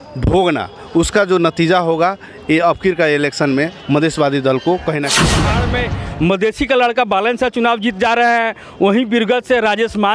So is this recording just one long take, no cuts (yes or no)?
no